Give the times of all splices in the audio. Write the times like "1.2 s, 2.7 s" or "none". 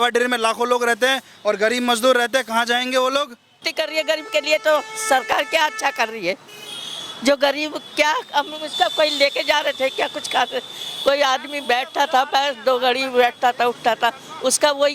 3.7 s